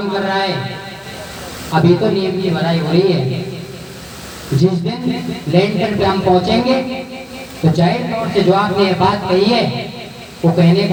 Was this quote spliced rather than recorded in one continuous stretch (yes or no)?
no